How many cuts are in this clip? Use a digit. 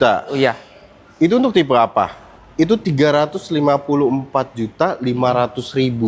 1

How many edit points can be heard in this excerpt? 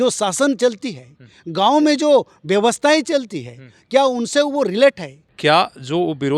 1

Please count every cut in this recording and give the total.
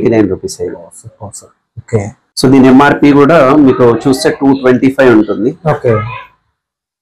1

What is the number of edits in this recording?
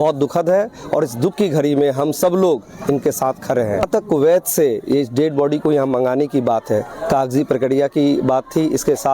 1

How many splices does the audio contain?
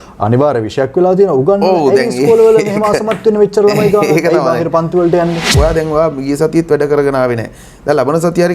1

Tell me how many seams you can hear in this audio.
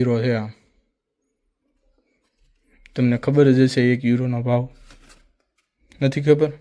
0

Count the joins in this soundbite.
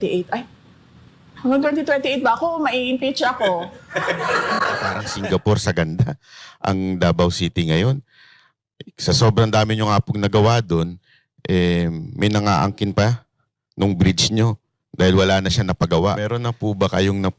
2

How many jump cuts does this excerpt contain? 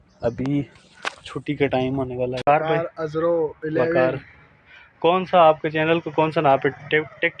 1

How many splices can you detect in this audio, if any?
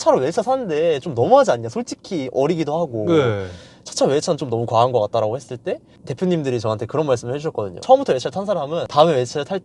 0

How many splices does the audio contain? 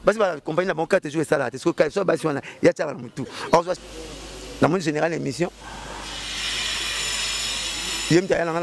1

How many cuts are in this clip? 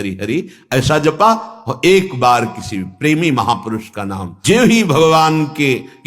1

